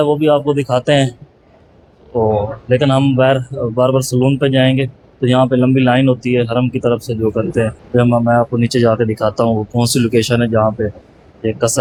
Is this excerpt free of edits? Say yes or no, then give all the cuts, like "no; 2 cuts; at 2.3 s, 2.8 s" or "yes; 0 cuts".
yes; 0 cuts